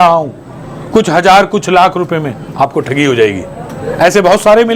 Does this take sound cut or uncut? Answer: uncut